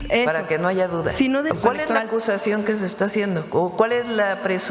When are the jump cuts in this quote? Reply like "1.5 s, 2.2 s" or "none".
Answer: 1.5 s

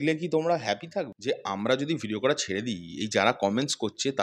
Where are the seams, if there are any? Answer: 1.1 s

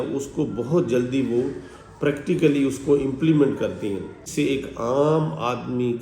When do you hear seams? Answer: 4.2 s

